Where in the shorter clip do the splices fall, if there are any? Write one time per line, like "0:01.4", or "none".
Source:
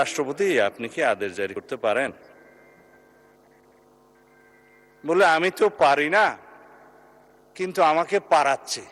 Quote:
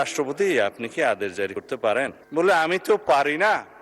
0:02.2